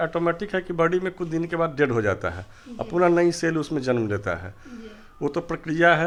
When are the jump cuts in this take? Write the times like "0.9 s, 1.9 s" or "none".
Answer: none